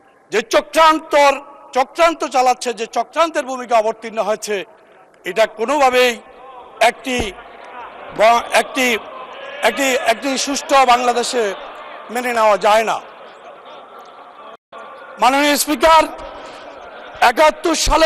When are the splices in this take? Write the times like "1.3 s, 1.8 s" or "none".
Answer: none

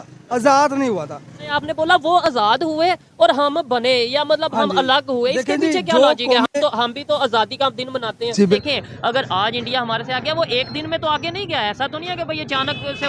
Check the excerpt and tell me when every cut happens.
1.5 s, 8.6 s

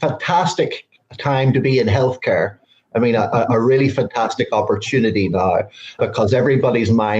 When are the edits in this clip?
6.0 s

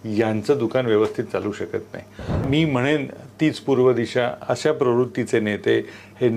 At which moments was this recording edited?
2.4 s

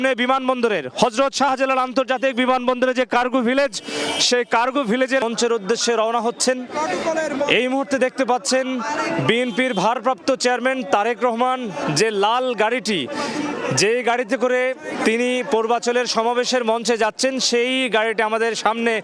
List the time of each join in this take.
5.2 s

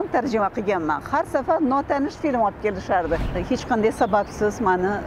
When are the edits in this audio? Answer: 3.3 s

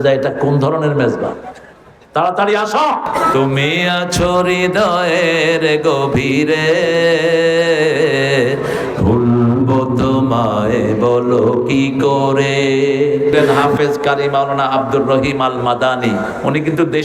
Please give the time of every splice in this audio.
3.2 s, 13.7 s

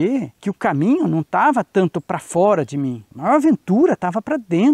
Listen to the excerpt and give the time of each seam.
none

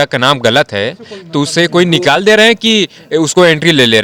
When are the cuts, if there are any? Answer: none

